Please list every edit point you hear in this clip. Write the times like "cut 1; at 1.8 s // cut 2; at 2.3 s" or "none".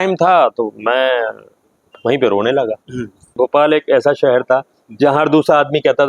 cut 1; at 3.4 s